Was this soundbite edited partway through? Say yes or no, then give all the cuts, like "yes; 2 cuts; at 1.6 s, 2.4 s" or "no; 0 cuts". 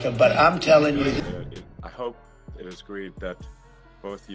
yes; 1 cut; at 1.4 s